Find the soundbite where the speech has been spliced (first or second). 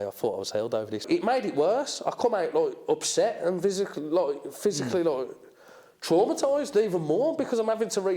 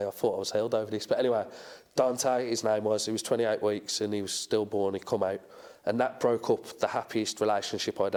first